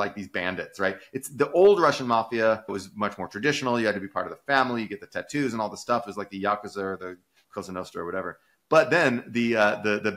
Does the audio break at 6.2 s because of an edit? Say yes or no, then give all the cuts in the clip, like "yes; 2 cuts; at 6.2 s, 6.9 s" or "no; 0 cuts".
no; 1 cut; at 2.8 s